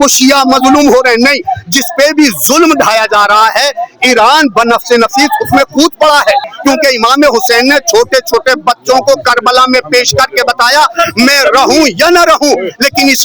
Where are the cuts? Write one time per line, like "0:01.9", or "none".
0:06.4